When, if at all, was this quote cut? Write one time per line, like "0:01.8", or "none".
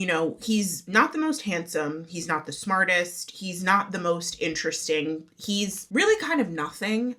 none

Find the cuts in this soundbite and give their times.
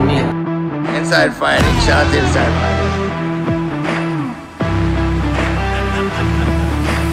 none

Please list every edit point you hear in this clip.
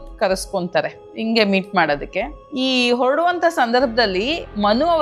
0:01.0
0:02.4

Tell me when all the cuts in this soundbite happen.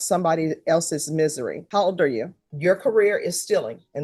0:02.4

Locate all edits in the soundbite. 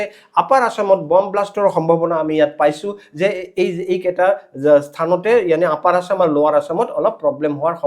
none

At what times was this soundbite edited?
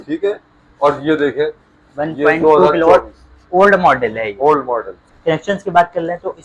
0:05.0

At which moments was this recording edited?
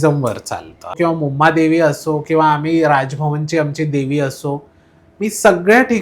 0:01.0

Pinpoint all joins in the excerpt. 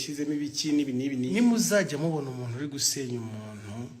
0:01.3

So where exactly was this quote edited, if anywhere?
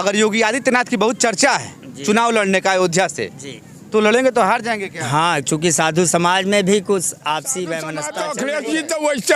0:08.1

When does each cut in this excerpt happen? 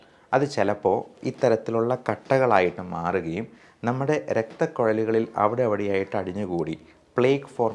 none

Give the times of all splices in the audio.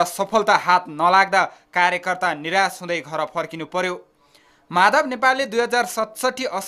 0:01.6

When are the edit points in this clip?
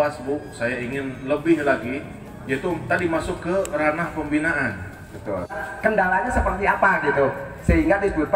0:05.6

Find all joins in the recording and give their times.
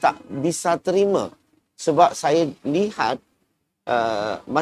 none

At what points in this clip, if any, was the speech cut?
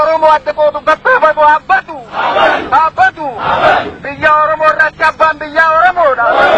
none

